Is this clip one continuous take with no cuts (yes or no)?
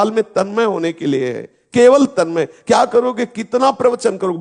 yes